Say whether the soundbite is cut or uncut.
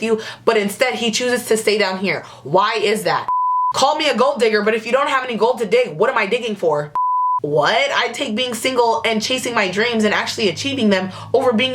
cut